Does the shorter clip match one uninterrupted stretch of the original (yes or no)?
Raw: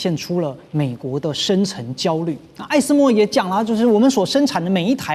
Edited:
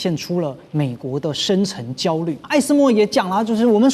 no